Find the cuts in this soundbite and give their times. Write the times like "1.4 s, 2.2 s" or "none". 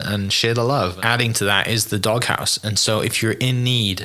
1.0 s